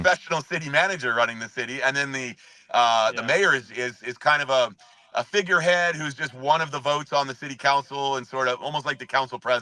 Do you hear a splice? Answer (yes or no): no